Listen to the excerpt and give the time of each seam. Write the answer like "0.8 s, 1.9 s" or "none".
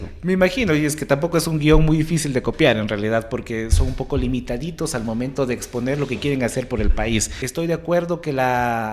7.4 s

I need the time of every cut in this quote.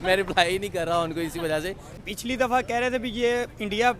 2.0 s

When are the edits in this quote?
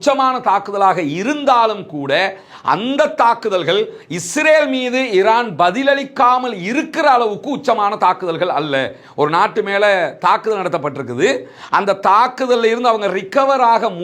none

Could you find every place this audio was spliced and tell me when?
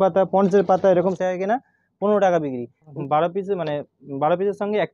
1.1 s, 2.9 s

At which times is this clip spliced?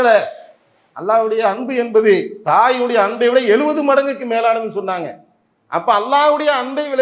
2.3 s

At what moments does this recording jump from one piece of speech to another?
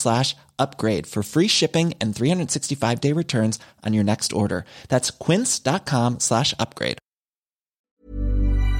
7.8 s

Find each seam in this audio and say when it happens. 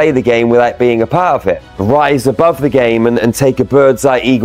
1.7 s

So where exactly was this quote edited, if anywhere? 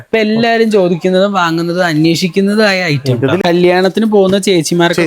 3.4 s

